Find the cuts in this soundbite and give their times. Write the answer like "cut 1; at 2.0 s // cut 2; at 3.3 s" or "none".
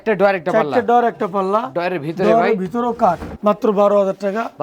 cut 1; at 3.4 s